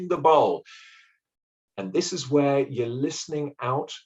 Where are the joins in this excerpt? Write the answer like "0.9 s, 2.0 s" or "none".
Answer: 1.6 s